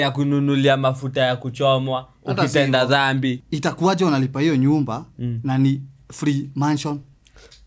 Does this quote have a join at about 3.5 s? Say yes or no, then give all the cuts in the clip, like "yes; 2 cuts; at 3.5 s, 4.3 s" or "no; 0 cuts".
yes; 1 cut; at 3.5 s